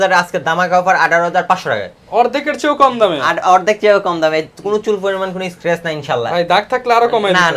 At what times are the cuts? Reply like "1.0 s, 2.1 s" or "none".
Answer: none